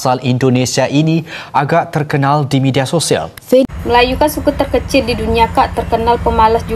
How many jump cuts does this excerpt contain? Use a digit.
1